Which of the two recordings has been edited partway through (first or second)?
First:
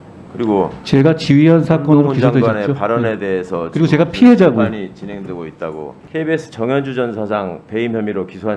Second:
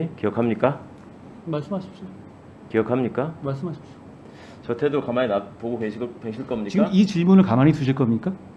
first